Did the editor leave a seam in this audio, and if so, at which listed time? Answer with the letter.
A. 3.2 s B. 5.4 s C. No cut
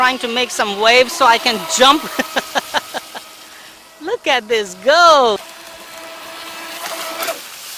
B